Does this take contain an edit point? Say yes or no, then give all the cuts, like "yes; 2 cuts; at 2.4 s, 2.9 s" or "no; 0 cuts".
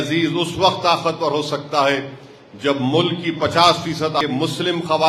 yes; 1 cut; at 4.2 s